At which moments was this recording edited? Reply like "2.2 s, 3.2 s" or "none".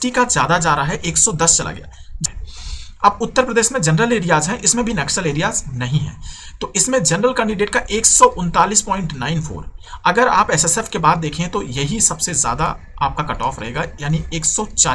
2.2 s